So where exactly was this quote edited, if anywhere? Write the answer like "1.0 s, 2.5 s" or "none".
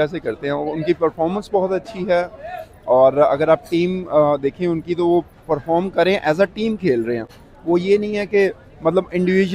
none